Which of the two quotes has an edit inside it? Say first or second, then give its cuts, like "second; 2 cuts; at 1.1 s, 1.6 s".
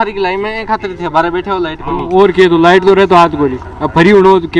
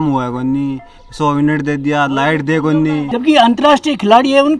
second; 1 cut; at 3.1 s